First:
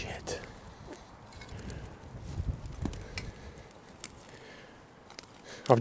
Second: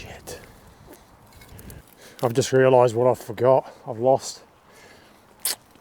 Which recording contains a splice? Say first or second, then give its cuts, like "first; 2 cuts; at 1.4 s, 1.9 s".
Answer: second; 1 cut; at 1.8 s